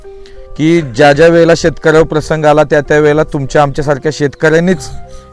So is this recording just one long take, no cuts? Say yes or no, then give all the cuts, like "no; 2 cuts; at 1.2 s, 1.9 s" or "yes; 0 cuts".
yes; 0 cuts